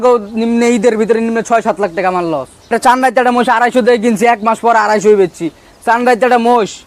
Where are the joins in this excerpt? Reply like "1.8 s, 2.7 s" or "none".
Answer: 2.7 s